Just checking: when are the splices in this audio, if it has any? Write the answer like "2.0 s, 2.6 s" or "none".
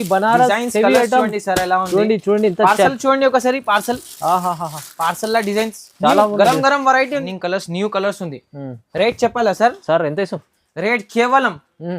7.3 s